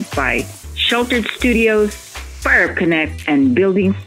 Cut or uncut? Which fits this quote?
uncut